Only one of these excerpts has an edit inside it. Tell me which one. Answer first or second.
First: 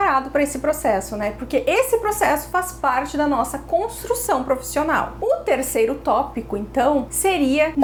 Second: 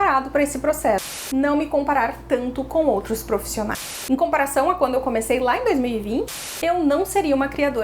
second